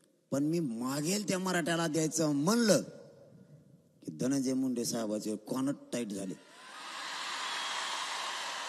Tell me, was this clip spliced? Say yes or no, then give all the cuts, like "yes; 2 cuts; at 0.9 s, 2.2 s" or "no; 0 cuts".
no; 0 cuts